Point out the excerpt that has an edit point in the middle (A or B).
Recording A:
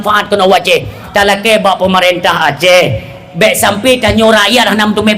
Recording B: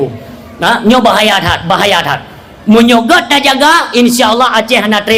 A